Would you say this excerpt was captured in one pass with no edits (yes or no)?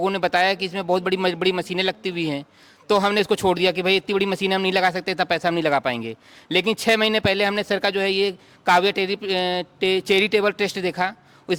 yes